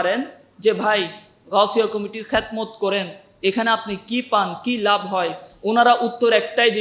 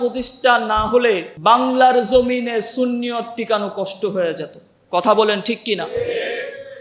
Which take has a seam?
second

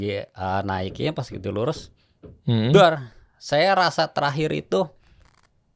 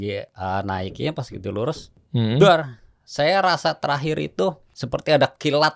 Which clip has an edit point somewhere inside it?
second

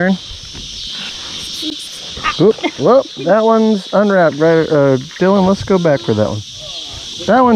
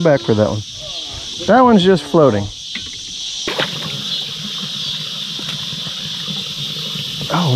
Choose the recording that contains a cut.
second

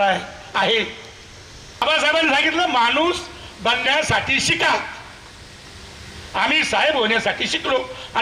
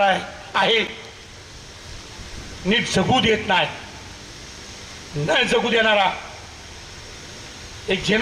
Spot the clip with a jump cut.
first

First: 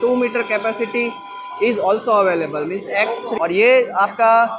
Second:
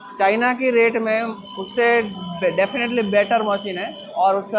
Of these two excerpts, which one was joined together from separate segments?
first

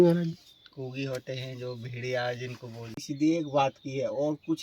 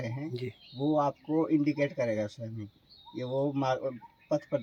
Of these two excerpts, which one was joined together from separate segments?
first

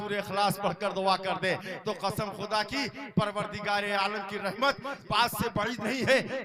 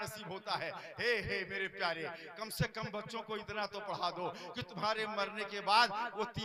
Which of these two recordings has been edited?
first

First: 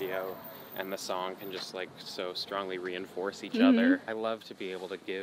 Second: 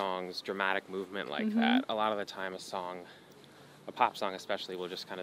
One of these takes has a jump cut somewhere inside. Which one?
first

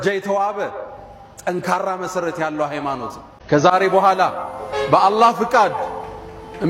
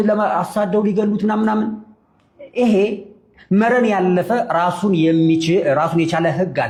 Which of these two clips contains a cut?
first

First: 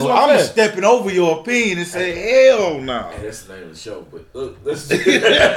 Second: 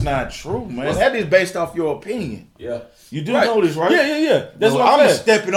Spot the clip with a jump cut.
second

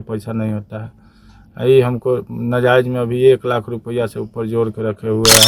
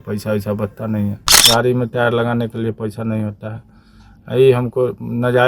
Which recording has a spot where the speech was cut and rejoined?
second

